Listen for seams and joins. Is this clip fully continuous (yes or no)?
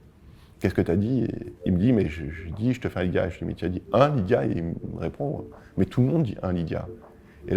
no